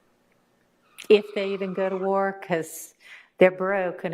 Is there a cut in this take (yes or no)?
no